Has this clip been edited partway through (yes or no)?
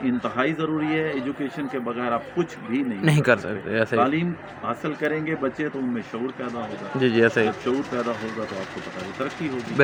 no